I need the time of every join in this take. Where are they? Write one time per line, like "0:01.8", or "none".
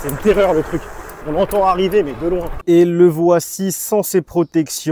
0:02.5